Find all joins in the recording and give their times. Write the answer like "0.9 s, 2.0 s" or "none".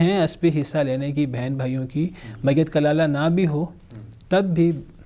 none